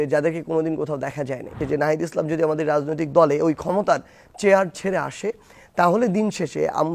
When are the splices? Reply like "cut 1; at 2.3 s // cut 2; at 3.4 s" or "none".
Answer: cut 1; at 1.6 s